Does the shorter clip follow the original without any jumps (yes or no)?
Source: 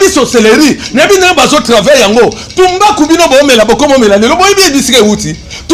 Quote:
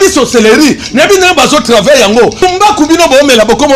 no